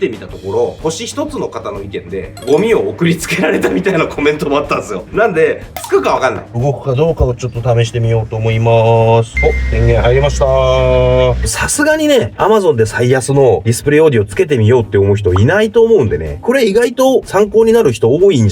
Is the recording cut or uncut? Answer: cut